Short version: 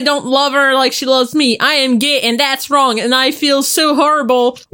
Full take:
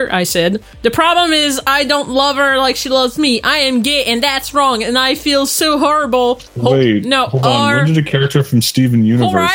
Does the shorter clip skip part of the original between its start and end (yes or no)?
no